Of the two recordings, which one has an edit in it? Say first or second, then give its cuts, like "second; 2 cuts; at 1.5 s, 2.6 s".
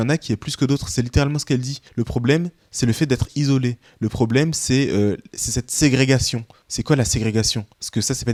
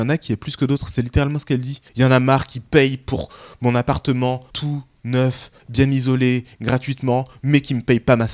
second; 2 cuts; at 1.8 s, 4.5 s